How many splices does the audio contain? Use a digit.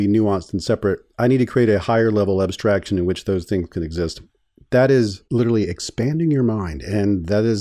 1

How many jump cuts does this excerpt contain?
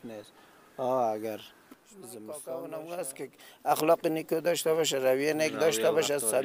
1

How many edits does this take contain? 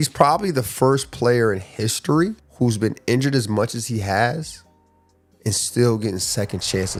0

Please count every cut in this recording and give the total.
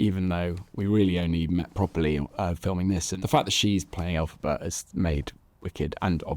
1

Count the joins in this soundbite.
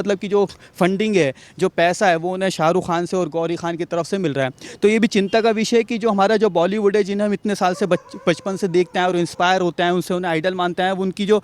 0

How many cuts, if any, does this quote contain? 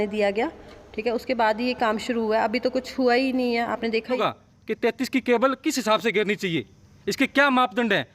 1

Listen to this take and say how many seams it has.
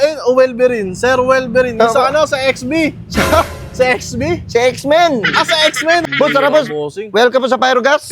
1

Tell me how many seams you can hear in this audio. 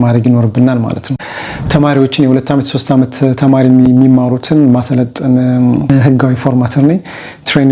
2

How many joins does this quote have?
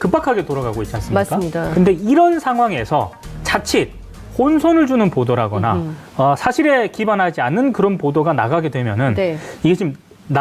1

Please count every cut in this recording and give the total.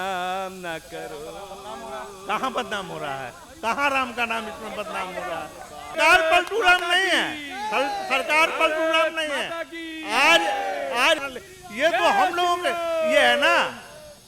2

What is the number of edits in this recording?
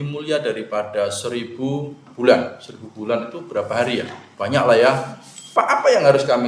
1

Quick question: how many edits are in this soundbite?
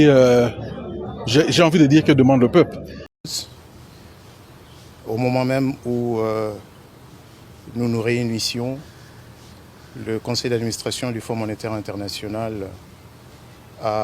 1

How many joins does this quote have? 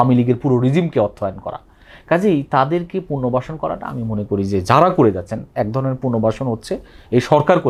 0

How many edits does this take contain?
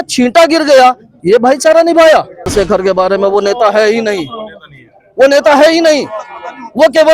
1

